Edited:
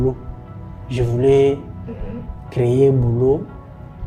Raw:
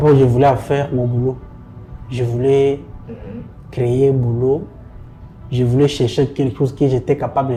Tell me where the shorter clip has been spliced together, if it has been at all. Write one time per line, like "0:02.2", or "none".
none